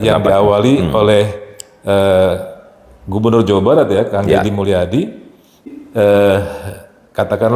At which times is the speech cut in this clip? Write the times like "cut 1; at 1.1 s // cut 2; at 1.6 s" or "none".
cut 1; at 5.7 s